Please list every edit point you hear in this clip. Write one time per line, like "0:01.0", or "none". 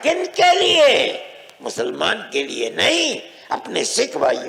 none